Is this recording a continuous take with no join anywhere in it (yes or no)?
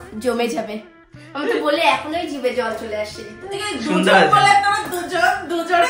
yes